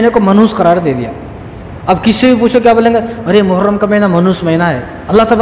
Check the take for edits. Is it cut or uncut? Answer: uncut